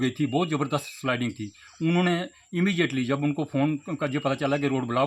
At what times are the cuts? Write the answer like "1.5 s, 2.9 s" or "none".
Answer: none